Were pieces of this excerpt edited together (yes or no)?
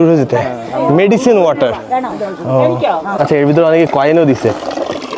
yes